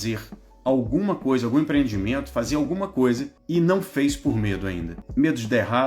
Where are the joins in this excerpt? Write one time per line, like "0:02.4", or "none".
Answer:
0:03.3
0:04.9

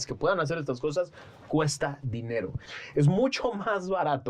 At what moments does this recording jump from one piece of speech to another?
0:02.7

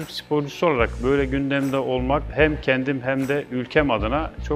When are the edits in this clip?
0:02.3

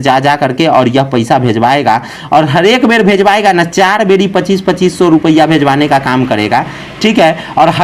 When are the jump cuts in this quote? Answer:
none

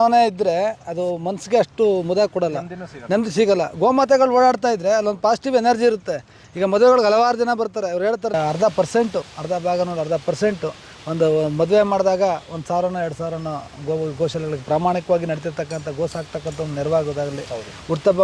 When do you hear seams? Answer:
0:08.3

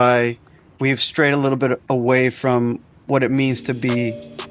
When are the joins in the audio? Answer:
none

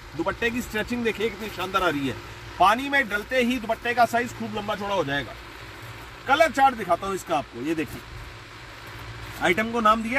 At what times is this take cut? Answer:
none

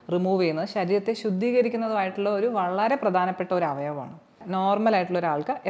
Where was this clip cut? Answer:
0:04.4

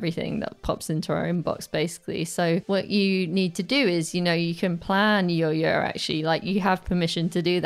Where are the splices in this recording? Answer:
0:02.6

